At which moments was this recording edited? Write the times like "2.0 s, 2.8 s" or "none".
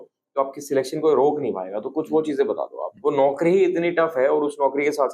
2.8 s